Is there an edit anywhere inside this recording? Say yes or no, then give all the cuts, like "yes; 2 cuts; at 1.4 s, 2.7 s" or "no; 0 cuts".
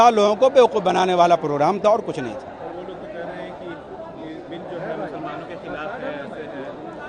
no; 0 cuts